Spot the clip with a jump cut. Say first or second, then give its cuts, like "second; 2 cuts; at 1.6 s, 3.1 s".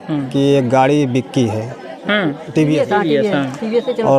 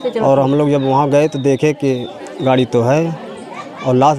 first; 1 cut; at 2.8 s